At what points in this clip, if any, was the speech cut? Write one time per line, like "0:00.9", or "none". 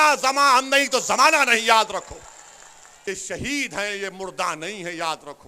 0:03.0